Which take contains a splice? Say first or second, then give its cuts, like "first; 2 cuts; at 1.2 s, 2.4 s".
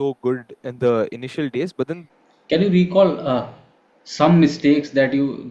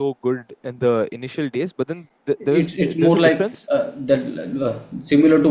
first; 1 cut; at 2.1 s